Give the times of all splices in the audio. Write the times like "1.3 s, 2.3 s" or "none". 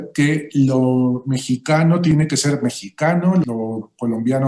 2.1 s, 3.4 s